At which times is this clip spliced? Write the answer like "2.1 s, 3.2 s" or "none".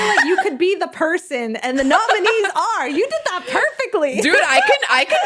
none